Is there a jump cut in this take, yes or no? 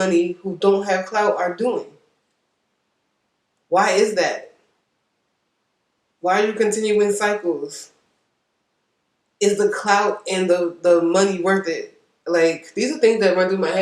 yes